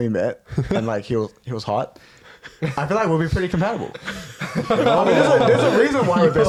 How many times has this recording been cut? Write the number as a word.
zero